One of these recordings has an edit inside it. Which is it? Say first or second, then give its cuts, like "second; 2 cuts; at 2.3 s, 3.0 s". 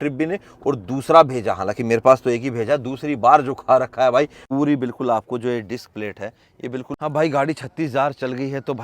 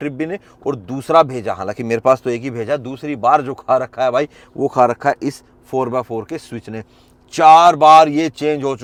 first; 2 cuts; at 4.4 s, 6.9 s